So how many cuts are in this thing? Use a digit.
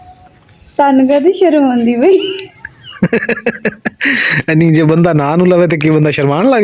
0